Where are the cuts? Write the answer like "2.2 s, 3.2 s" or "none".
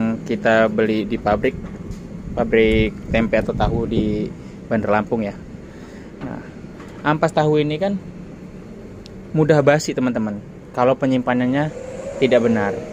none